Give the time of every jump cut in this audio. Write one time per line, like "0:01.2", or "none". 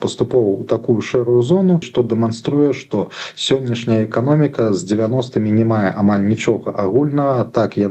0:01.9